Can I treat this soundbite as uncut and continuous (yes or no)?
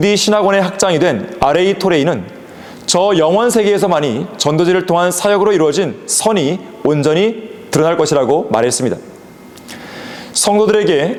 yes